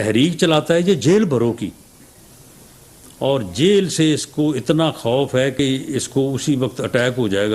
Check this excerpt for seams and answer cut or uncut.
cut